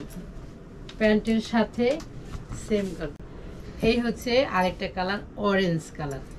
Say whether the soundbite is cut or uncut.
cut